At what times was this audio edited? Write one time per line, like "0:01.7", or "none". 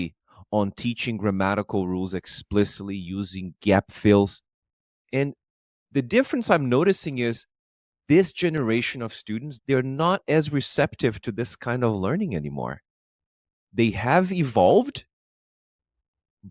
0:09.5